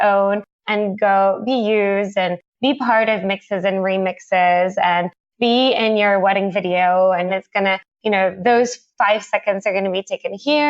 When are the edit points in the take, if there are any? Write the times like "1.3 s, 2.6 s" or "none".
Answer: 7.3 s